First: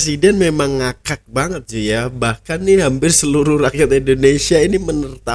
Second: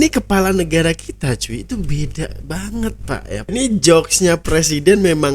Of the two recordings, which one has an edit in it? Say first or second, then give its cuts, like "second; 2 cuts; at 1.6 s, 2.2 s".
second; 1 cut; at 3.5 s